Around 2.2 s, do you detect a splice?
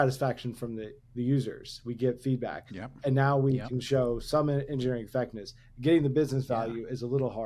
no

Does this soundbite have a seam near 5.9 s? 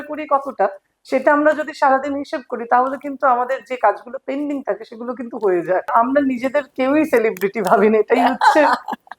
yes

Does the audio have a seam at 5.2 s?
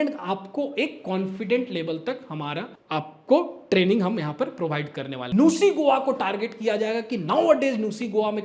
yes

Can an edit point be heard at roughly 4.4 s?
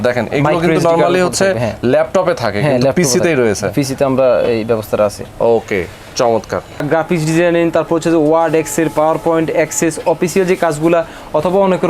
no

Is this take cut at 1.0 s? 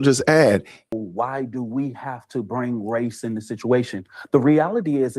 yes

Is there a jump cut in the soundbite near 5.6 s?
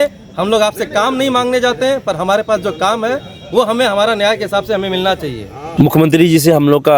yes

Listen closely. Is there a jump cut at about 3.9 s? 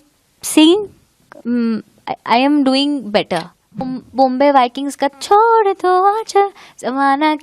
yes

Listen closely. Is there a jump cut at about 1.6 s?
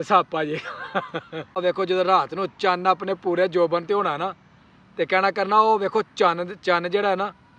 yes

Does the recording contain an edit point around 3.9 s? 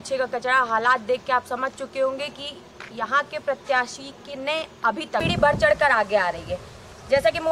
no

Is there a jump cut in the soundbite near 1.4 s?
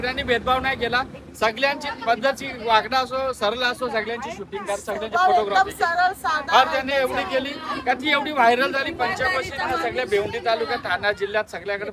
no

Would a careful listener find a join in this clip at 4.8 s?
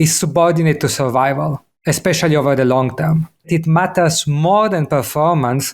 no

